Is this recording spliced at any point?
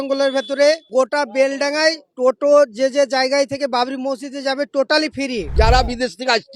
yes; 3 cuts; at 0.8 s, 2.1 s, 5.5 s

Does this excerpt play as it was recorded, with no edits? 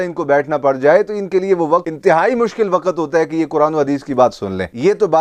yes; 0 cuts

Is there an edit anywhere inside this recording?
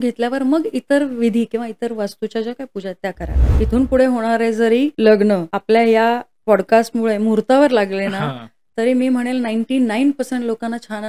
yes; 3 cuts; at 3.4 s, 4.9 s, 5.5 s

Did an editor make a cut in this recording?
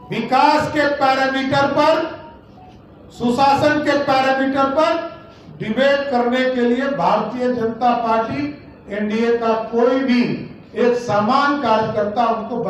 no; 0 cuts

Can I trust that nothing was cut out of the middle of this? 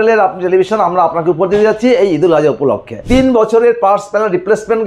no; 1 cut; at 3.1 s

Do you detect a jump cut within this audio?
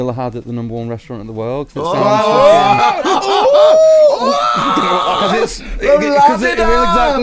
no; 0 cuts

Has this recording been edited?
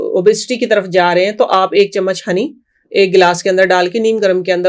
no; 0 cuts

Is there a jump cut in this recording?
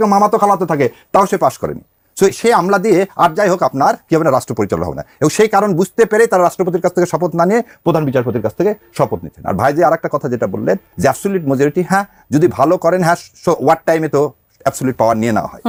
no; 0 cuts

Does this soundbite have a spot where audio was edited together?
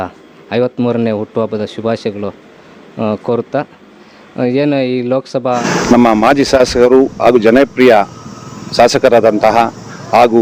yes; 1 cut; at 5.6 s

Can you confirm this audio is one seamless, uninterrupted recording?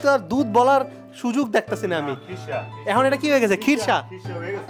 yes; 0 cuts

